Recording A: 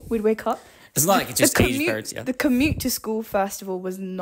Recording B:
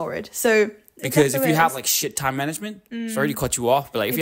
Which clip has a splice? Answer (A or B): B